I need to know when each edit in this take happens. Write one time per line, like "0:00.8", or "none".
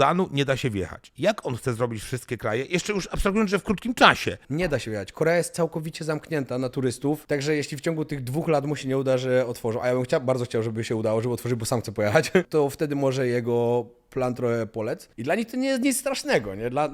0:01.0
0:04.4
0:07.2
0:12.5
0:15.1

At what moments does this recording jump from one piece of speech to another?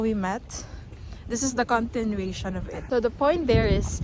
0:02.8

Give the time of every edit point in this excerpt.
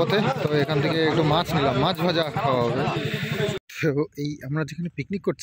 0:03.6

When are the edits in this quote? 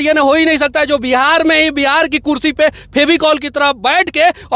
none

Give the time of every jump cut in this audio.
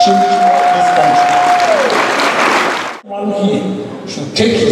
0:03.1

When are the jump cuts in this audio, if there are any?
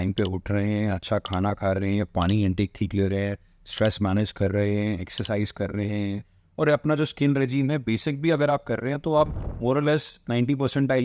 none

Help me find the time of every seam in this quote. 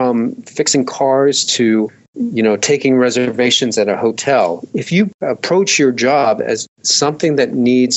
none

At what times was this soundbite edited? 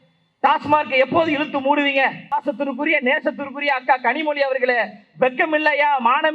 0:02.3

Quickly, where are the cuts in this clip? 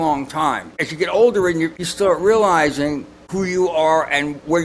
0:00.8
0:01.8
0:03.2

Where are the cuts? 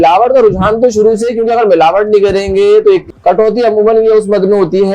0:03.0

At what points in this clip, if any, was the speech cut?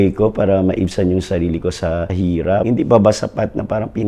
0:02.2

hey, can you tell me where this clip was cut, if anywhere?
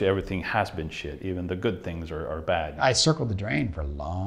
0:02.8

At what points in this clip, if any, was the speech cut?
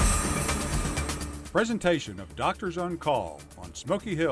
0:01.3

